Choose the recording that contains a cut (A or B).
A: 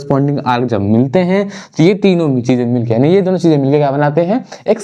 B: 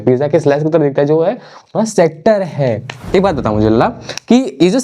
B